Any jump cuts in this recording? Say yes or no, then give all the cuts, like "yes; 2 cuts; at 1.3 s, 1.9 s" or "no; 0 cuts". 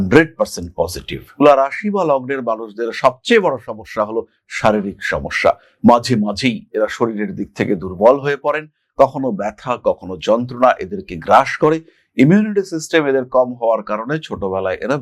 no; 0 cuts